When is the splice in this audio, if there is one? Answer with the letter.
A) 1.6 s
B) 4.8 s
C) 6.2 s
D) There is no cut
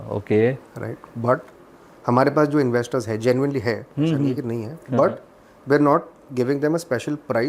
D